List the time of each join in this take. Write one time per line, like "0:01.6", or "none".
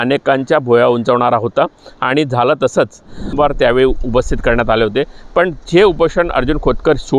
0:03.3